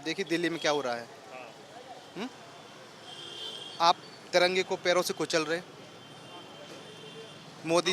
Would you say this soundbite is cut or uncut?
uncut